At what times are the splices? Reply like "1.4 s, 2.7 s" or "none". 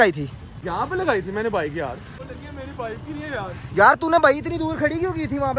2.1 s